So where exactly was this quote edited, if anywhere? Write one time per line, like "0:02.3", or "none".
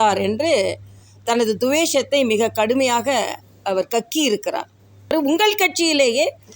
0:05.1

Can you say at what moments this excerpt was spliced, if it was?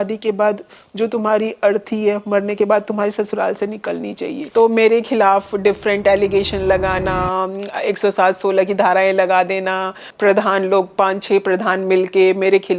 0:04.3
0:10.0

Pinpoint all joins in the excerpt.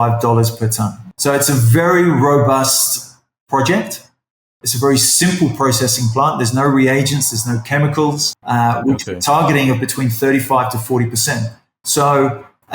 0:01.0
0:08.3

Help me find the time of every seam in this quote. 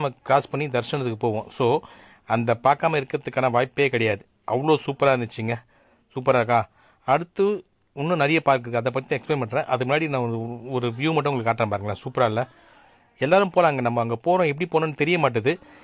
none

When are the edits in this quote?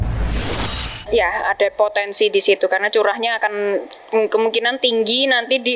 none

